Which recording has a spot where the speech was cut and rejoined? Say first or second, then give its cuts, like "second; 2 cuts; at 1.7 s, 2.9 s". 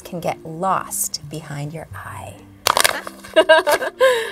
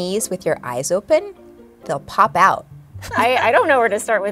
second; 1 cut; at 2.9 s